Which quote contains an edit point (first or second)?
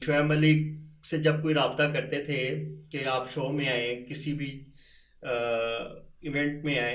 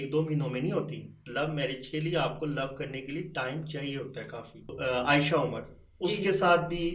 second